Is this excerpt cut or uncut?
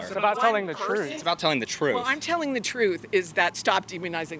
uncut